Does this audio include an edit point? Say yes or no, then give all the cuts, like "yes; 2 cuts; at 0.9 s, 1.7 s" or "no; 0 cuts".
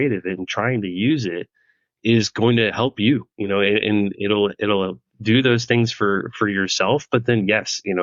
no; 0 cuts